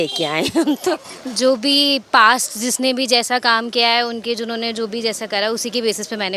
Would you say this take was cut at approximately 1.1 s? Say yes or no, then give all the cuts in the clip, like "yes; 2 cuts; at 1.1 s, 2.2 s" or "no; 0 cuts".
yes; 1 cut; at 1.1 s